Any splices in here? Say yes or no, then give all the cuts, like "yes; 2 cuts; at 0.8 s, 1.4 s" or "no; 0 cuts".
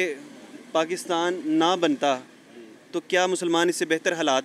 no; 0 cuts